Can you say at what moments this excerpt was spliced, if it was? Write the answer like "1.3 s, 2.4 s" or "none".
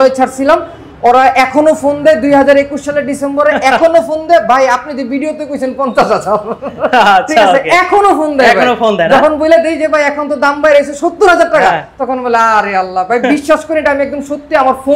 none